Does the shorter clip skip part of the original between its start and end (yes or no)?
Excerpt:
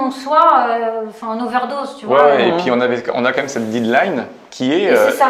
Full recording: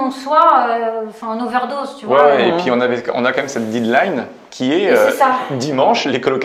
no